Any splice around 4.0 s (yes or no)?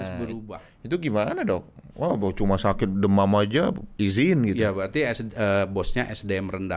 no